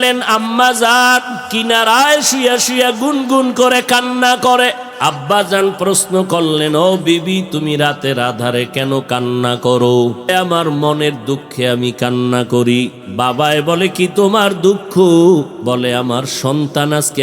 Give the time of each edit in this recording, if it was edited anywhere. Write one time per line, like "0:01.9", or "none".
0:04.9
0:10.2
0:13.0
0:15.6

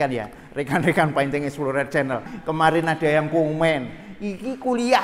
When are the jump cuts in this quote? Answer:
0:02.3

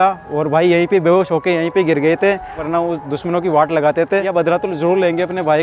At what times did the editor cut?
0:02.6
0:04.3

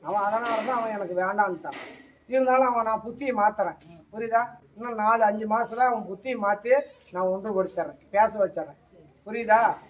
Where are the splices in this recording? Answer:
none

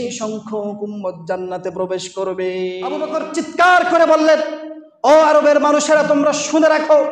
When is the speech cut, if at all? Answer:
0:03.0

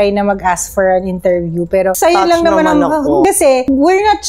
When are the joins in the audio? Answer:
0:01.9
0:03.2

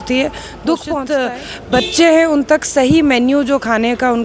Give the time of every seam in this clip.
0:01.1

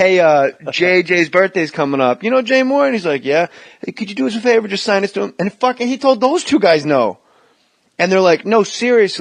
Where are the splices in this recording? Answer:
0:07.2

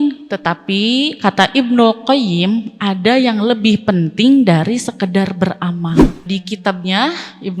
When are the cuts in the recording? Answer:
0:06.3

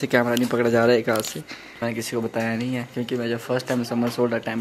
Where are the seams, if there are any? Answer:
0:01.8

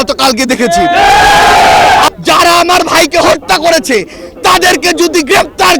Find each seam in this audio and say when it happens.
0:02.1

